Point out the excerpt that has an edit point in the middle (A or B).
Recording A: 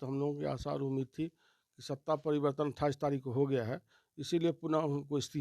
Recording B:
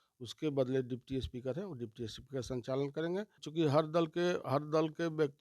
B